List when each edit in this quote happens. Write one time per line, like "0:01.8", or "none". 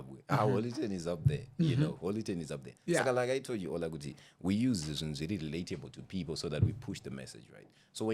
none